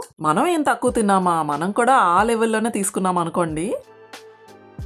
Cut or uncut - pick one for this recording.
uncut